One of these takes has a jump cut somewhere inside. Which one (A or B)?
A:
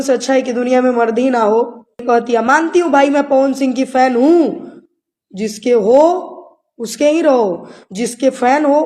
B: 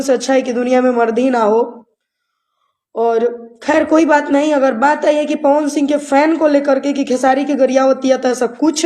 A